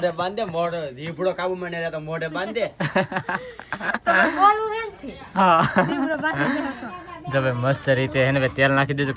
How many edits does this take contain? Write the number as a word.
zero